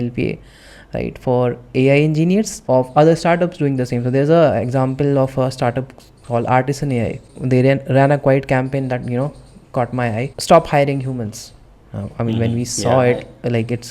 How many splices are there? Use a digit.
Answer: 3